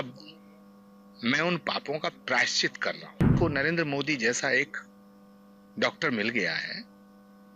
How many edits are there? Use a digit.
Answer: 1